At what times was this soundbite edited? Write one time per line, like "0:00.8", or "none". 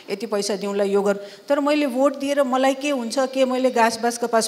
none